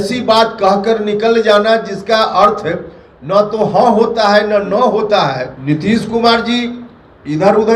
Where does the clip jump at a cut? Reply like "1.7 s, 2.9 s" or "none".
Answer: 5.5 s